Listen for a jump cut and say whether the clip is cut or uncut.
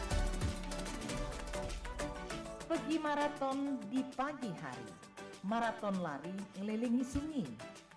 cut